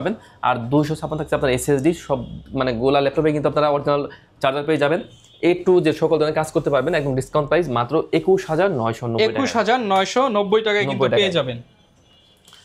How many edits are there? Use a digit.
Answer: 0